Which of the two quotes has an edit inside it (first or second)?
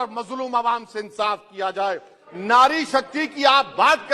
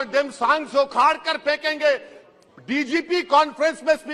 first